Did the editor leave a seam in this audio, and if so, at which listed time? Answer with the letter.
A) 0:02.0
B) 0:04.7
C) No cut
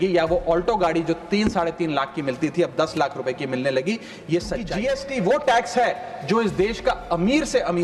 B